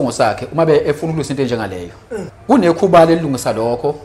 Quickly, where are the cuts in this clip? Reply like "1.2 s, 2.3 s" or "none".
2.3 s

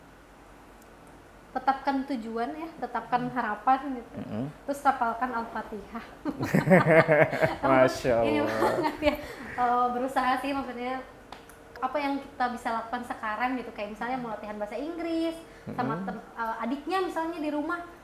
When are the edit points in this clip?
none

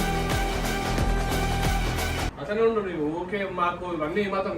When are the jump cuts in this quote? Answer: 2.3 s

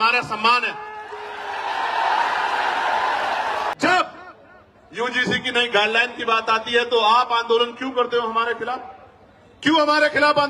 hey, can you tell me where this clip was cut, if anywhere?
3.8 s

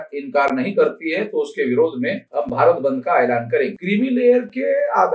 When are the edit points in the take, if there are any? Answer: 3.8 s

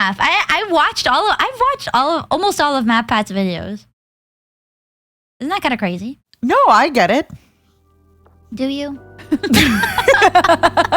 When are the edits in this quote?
none

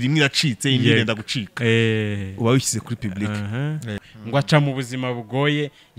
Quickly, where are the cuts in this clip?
4.1 s

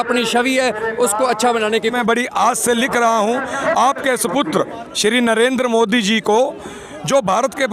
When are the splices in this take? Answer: 1.9 s

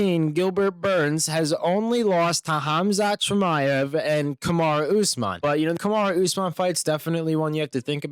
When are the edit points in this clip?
5.4 s

